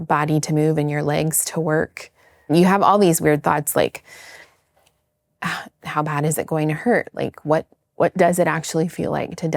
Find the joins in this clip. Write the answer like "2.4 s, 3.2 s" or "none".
2.5 s

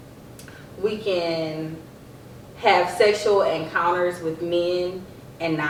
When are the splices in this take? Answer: none

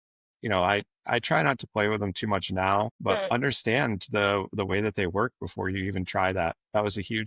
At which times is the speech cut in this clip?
3.3 s

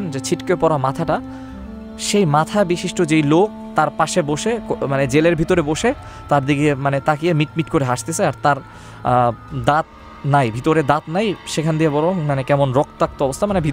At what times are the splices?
none

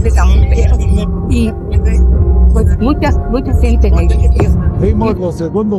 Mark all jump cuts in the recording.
4.7 s

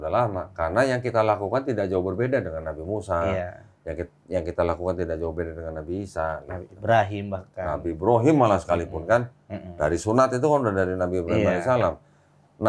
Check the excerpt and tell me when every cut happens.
none

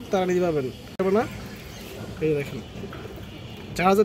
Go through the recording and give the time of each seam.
1.0 s

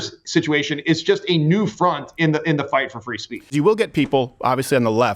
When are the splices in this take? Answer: 3.5 s

